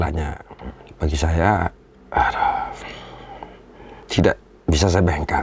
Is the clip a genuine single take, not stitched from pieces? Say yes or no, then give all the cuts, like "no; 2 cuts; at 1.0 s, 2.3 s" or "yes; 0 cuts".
no; 1 cut; at 4.0 s